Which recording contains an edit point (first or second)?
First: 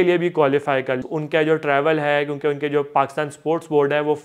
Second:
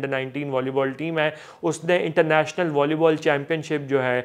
first